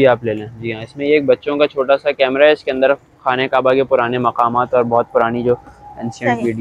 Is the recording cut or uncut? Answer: uncut